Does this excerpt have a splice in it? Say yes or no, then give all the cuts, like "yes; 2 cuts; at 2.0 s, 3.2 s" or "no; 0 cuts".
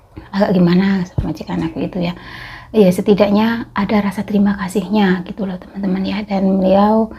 no; 0 cuts